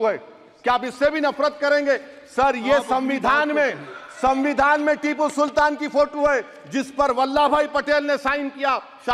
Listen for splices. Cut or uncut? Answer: uncut